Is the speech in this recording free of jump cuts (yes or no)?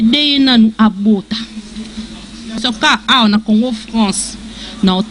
no